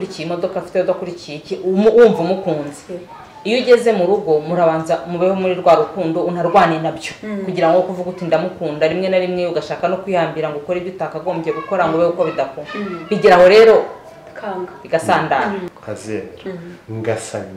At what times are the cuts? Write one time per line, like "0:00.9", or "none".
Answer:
0:15.7